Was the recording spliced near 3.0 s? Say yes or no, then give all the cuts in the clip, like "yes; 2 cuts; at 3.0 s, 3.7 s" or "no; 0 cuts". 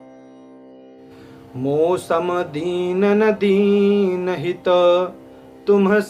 no; 1 cut; at 1.6 s